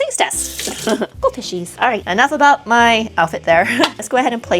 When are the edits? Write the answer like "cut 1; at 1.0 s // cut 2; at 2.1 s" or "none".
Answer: cut 1; at 1.1 s

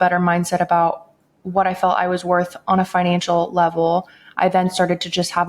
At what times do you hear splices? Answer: none

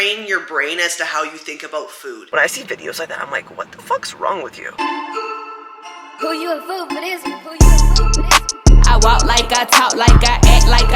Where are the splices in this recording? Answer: cut 1; at 2.2 s // cut 2; at 4.7 s

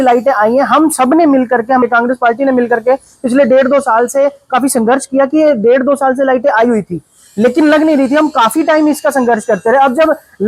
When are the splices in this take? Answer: cut 1; at 1.8 s

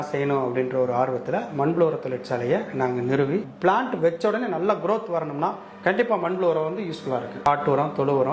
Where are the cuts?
cut 1; at 3.5 s // cut 2; at 7.4 s

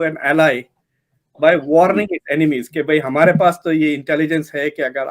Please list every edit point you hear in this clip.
none

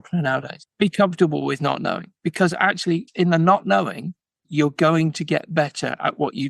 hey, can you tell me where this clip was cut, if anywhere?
none

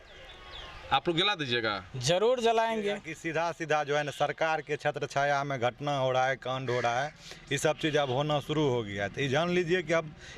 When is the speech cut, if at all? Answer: cut 1; at 3.1 s

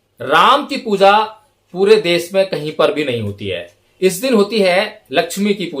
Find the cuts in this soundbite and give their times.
none

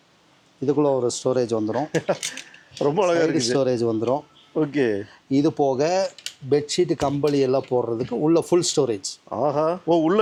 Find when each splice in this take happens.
none

